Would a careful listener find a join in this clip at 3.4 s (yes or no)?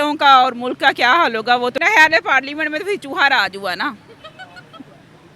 no